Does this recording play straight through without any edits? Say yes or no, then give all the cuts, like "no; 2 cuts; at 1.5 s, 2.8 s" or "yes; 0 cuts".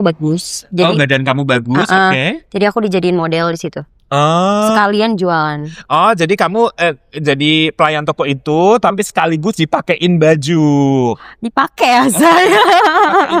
yes; 0 cuts